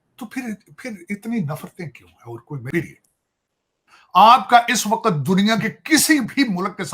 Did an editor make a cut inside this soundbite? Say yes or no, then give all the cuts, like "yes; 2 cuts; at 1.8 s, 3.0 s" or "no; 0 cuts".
yes; 1 cut; at 2.6 s